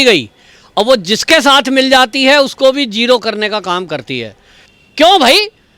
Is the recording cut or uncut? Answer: cut